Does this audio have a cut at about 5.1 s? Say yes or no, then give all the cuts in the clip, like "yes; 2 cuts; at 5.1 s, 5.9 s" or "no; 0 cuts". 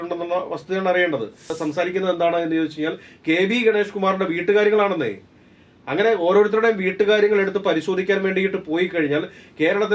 no; 1 cut; at 1.6 s